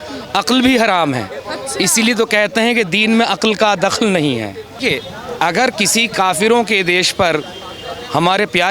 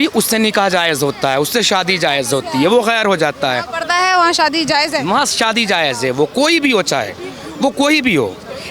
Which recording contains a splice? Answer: first; 1 cut; at 4.8 s

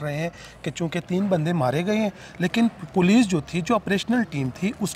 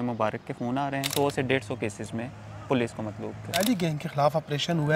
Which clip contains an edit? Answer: second; 2 cuts; at 1.1 s, 3.6 s

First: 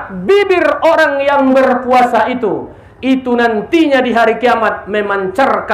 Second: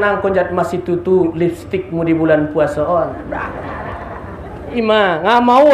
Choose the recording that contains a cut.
second; 1 cut; at 4.7 s

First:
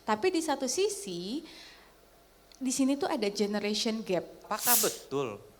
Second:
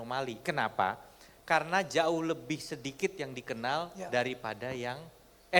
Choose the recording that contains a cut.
first; 1 cut; at 4.5 s

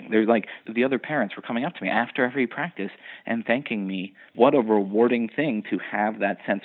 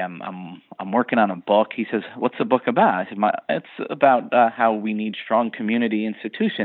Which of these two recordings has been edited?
first; 1 cut; at 4.3 s

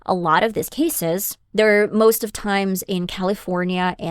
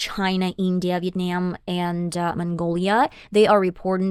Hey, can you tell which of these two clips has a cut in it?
first; 1 cut; at 1.4 s

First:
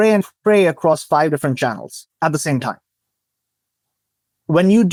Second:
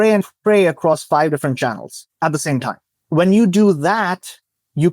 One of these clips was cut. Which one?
second; 1 cut; at 2.9 s

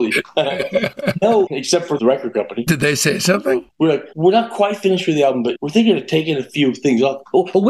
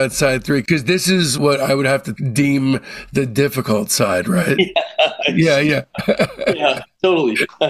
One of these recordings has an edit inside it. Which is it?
first; 3 cuts; at 2.0 s, 3.7 s, 5.6 s

